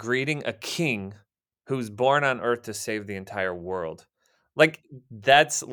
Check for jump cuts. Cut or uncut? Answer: uncut